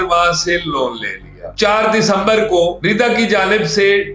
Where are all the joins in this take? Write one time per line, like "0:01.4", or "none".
0:01.4